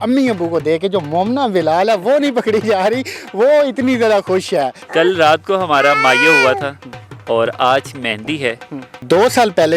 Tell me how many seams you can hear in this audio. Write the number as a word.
two